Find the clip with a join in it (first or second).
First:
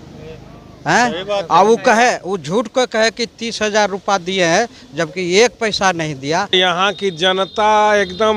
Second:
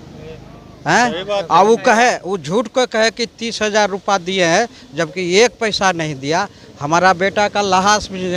first